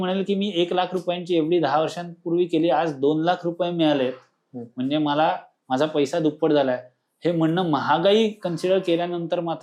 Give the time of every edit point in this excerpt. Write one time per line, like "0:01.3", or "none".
none